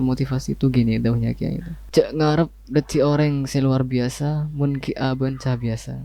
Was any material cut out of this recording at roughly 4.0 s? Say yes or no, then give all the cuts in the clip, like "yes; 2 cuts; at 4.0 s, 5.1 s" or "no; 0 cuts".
no; 1 cut; at 1.7 s